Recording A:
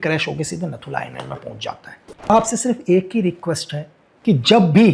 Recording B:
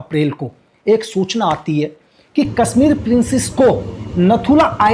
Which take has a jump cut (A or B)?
A